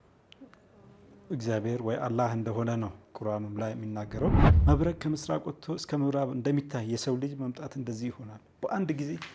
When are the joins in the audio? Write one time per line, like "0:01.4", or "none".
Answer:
0:04.5